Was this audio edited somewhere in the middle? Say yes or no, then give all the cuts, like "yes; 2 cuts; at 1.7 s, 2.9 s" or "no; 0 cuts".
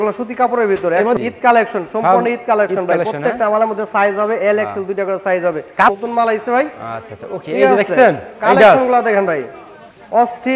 yes; 2 cuts; at 1.2 s, 5.9 s